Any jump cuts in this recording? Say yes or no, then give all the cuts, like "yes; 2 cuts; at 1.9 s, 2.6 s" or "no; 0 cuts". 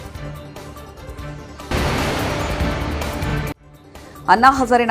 no; 0 cuts